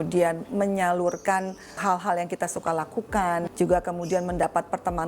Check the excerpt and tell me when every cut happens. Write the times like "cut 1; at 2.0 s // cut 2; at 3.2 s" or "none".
cut 1; at 1.8 s // cut 2; at 3.5 s